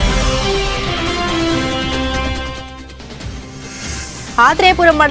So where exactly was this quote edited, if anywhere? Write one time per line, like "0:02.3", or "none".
0:04.1